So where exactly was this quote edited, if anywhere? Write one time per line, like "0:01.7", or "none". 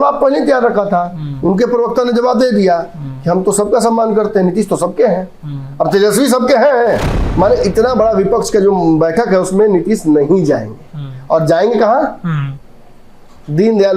0:07.2

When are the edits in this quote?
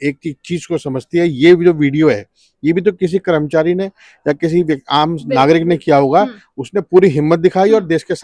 none

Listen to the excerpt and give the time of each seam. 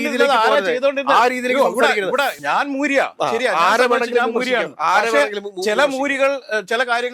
0:02.4

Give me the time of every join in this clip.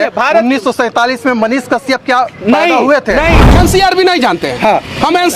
0:03.5

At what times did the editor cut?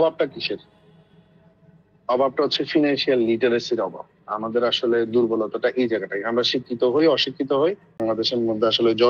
0:08.0

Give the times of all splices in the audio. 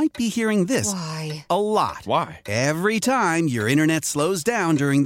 none

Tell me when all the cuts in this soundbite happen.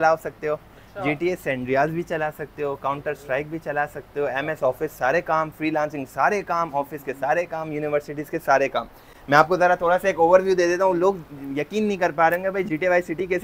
none

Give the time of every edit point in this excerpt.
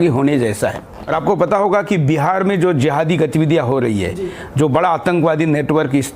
0:00.9

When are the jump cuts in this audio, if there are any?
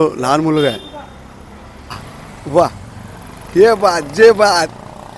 0:02.1

